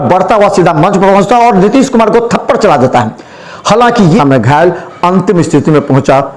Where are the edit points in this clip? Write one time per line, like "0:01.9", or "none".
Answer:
0:04.2